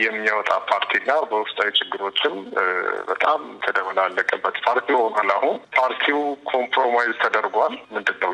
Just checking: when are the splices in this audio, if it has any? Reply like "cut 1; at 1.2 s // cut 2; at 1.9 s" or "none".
cut 1; at 5.6 s